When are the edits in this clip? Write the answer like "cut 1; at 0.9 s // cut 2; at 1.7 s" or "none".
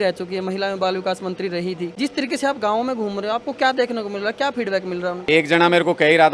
cut 1; at 1.9 s // cut 2; at 5.2 s